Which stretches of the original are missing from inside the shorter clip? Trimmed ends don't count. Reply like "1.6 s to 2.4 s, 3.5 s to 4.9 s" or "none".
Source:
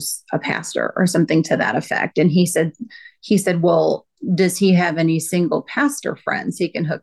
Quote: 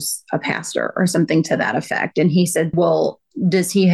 2.7 s to 3.6 s

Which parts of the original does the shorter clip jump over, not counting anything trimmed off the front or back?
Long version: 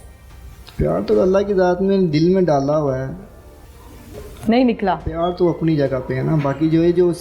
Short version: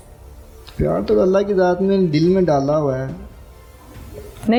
none

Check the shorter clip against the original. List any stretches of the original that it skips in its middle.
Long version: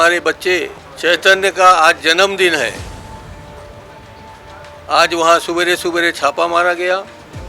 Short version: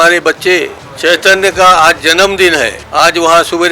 2.8 s to 4.8 s

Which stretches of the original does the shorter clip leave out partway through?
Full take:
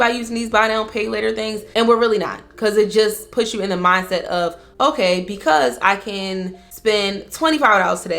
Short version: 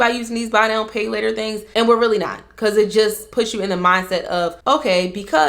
4.6 s to 4.7 s

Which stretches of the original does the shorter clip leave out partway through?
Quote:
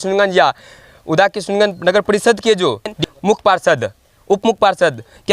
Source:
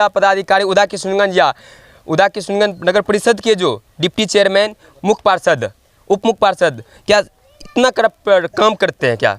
4.0 s to 4.8 s

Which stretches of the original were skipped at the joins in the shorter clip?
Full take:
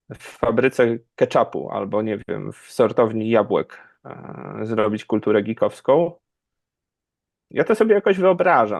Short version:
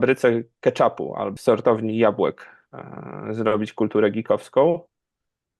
1.8 s to 2.6 s

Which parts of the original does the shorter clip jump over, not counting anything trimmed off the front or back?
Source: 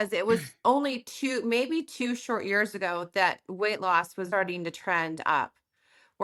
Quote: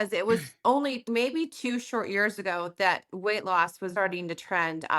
1.1 s to 1.4 s

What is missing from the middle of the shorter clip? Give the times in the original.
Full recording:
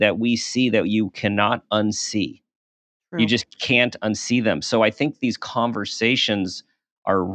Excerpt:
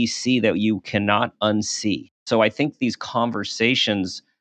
2.5 s to 4.6 s

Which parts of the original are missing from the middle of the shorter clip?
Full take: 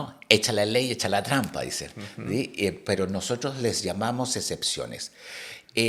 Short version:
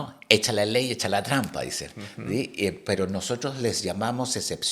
none

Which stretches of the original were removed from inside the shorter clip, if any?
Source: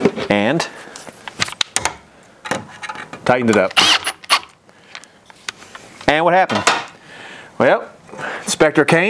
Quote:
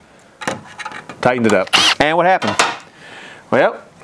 3.9 s to 6.0 s

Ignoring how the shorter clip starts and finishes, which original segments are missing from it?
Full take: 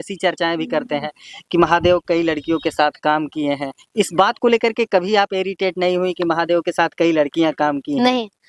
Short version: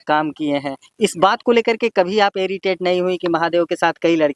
none

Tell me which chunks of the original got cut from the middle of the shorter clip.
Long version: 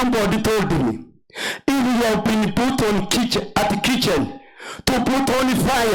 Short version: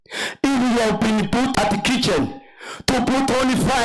2.8 s to 3.5 s

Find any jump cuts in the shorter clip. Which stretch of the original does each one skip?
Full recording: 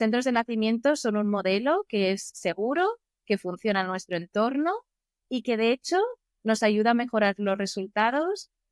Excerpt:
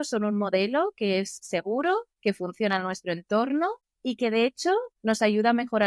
3.0 s to 3.2 s, 4.9 s to 5.1 s, 6.2 s to 6.3 s

